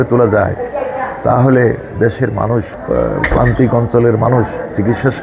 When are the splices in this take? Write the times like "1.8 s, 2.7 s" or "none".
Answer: 2.7 s